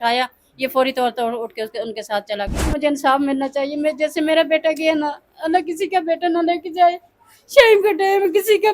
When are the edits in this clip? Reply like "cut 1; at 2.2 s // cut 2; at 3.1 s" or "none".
cut 1; at 2.8 s